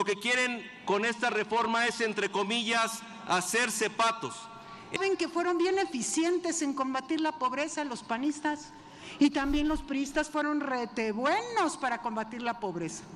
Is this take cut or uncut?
cut